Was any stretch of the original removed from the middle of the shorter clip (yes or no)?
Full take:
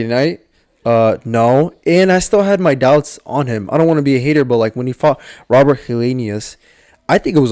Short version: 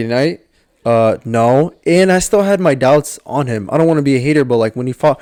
no